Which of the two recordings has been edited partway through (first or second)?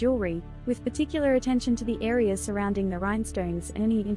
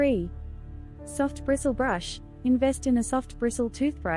second